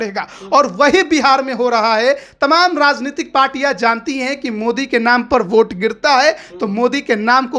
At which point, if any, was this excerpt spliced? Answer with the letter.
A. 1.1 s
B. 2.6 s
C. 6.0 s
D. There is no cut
D